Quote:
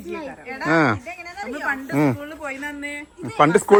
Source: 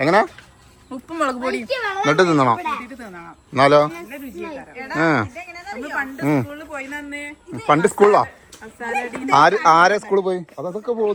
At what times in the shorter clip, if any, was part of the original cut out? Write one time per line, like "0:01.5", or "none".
none